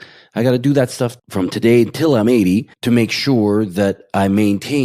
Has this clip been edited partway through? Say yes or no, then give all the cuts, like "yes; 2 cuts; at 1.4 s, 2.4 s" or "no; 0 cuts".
yes; 1 cut; at 2.7 s